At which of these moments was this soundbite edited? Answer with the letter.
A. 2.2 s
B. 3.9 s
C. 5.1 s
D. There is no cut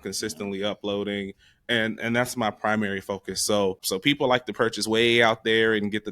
B